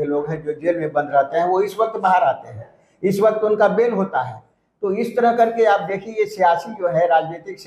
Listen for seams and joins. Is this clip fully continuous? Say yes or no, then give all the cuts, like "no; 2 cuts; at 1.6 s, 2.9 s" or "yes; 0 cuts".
yes; 0 cuts